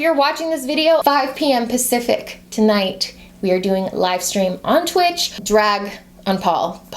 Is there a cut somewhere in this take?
yes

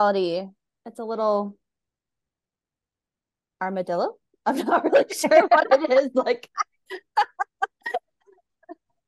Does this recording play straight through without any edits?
yes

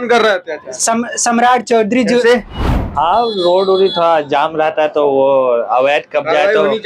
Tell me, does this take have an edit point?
yes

